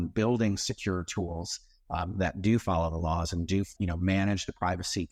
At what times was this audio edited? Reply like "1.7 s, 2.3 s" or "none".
none